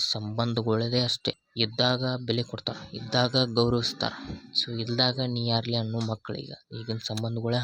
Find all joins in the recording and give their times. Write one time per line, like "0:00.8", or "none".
0:01.4